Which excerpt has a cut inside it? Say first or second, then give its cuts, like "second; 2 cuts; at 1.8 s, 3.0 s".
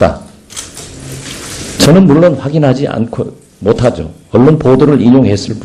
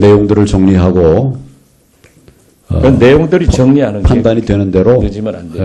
first; 1 cut; at 3.8 s